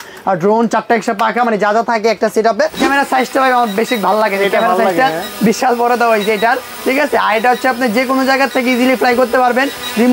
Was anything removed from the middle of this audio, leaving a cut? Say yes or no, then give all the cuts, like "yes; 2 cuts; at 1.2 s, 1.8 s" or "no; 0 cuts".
yes; 1 cut; at 2.8 s